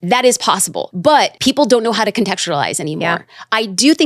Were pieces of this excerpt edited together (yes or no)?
yes